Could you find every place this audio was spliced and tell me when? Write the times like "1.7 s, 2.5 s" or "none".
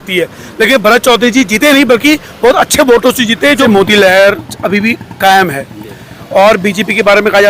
3.6 s